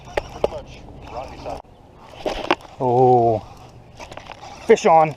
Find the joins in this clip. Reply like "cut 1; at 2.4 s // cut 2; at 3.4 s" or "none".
cut 1; at 1.6 s